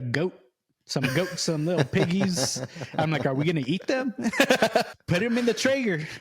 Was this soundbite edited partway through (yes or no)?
yes